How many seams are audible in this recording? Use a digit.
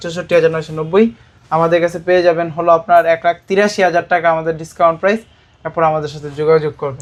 0